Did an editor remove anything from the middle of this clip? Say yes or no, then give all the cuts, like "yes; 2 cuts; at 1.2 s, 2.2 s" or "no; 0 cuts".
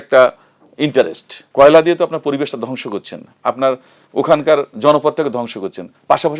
yes; 1 cut; at 1.4 s